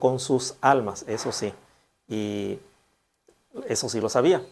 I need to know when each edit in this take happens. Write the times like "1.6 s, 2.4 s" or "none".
none